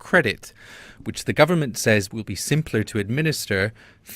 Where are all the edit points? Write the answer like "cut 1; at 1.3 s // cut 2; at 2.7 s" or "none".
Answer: cut 1; at 2.2 s